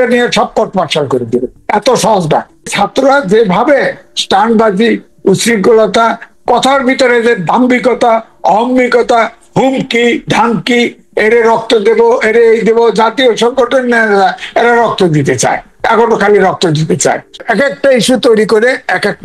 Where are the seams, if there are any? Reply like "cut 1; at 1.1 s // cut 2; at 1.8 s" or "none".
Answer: cut 1; at 2.7 s // cut 2; at 17.4 s